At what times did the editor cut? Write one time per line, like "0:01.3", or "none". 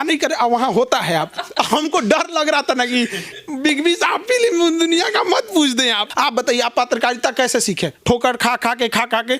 0:06.0